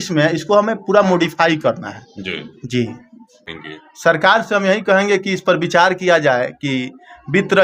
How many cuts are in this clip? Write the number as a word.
one